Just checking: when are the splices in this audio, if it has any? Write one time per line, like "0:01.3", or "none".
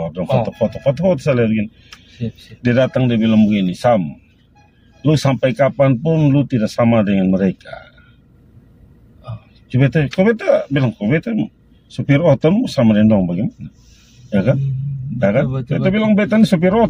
none